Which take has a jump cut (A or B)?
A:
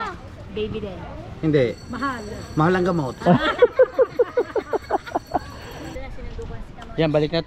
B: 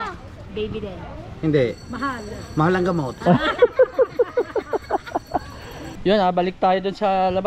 A